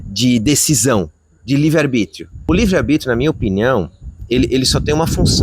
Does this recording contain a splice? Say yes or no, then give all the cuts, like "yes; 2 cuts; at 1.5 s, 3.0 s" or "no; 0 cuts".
yes; 1 cut; at 2.4 s